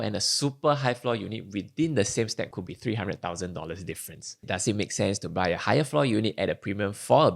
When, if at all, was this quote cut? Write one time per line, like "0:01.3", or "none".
0:02.5
0:04.5